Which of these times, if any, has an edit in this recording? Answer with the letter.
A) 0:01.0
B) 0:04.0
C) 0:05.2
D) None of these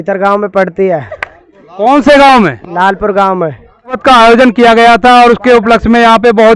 B